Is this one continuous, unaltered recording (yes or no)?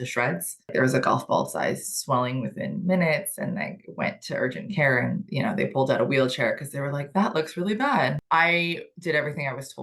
no